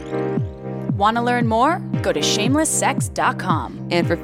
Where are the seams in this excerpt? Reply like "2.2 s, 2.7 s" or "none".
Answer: 1.0 s